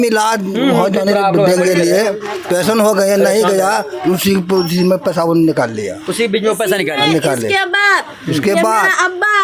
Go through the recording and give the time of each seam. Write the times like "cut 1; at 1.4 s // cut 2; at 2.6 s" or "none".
none